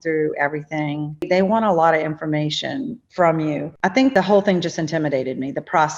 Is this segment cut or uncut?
cut